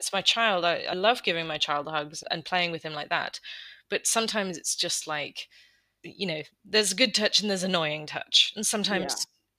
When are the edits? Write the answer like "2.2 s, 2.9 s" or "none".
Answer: 0.9 s, 2.2 s, 6.0 s